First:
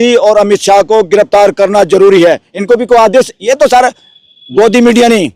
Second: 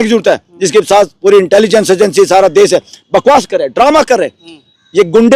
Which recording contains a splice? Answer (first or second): first